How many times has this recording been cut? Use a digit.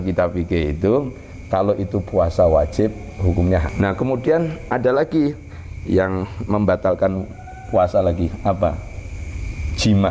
1